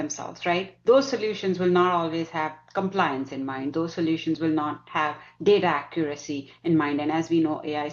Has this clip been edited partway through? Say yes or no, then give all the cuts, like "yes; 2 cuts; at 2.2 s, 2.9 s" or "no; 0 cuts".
no; 0 cuts